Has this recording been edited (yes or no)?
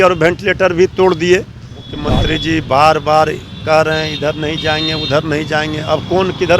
yes